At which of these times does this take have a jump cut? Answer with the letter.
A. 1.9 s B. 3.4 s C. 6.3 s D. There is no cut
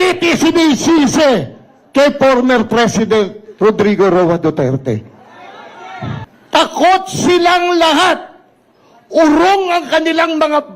C